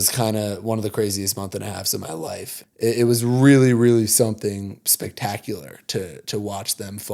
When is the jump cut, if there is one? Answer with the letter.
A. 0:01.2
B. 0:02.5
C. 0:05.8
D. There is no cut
B